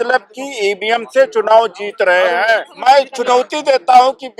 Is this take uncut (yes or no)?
no